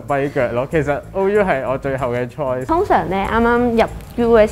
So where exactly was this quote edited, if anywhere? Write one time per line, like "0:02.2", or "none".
0:02.6

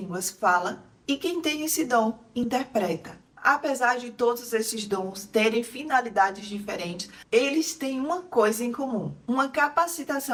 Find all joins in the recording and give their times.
none

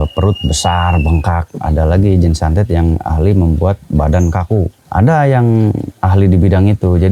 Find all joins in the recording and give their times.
0:04.8
0:05.9

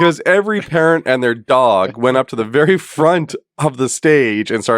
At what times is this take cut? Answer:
none

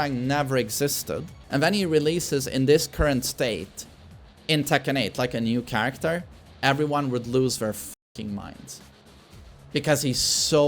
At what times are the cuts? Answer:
0:01.3

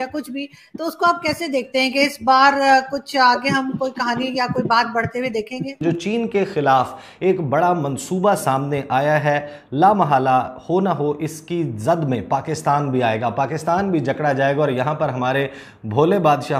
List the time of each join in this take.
0:05.8

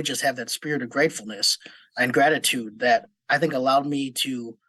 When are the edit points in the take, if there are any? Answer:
none

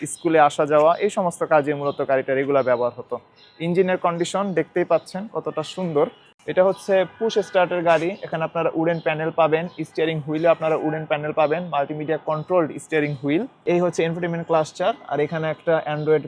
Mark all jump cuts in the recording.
0:06.3

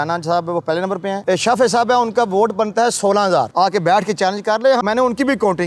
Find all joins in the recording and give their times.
0:01.2
0:03.5
0:04.8

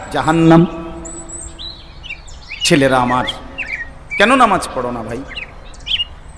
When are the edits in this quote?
0:05.5

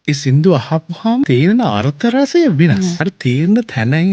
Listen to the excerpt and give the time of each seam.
0:01.2
0:03.1

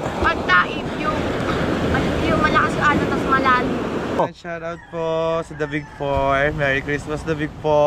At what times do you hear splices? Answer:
0:04.2

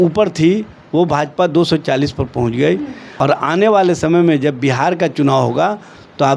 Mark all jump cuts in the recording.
0:03.0

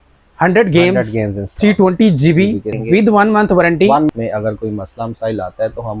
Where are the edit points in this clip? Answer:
0:02.8
0:04.1

